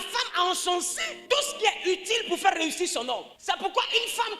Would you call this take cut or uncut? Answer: cut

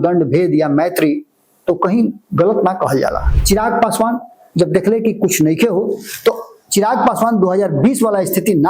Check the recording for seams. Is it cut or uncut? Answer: cut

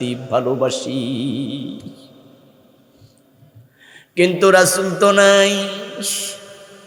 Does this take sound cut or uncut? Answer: uncut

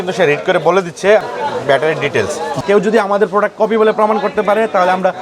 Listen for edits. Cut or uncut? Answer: cut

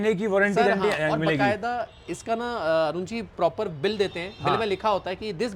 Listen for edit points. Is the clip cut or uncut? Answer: uncut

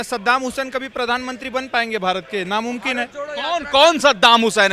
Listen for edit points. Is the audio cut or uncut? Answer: uncut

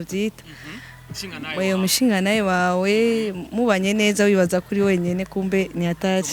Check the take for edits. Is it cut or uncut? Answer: uncut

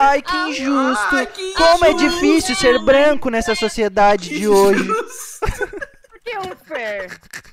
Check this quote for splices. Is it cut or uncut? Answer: uncut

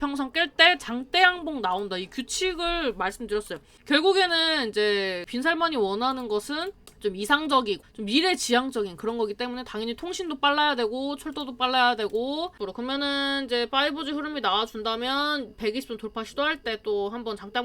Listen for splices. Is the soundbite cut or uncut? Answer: cut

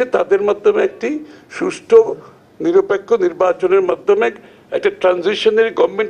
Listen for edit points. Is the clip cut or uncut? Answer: uncut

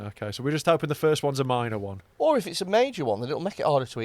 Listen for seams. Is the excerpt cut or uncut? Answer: cut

